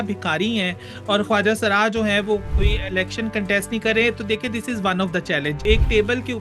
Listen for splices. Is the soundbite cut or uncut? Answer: cut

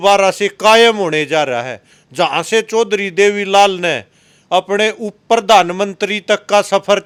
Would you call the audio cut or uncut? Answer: uncut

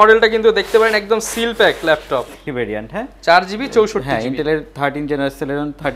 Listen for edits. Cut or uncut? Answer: cut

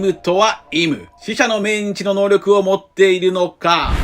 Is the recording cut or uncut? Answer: uncut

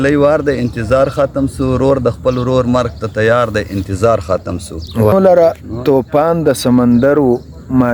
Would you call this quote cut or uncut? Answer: cut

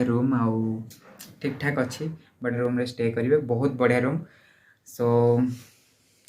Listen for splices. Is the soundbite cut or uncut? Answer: cut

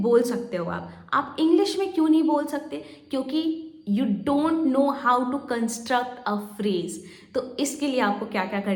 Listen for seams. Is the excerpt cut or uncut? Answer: uncut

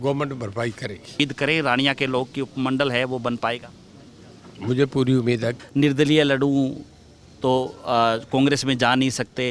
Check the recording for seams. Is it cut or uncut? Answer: cut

